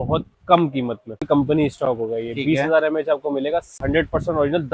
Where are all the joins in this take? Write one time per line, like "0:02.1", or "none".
0:01.2
0:03.7